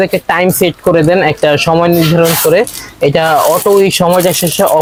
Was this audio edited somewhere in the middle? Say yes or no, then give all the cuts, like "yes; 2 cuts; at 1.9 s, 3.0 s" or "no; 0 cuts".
no; 0 cuts